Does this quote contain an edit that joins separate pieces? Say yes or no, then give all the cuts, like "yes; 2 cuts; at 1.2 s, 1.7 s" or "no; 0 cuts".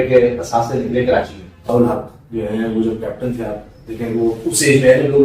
yes; 1 cut; at 1.6 s